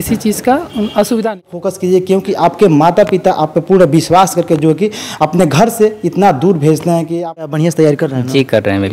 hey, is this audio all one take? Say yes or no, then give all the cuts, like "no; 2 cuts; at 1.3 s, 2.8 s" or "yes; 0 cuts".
no; 2 cuts; at 1.5 s, 7.3 s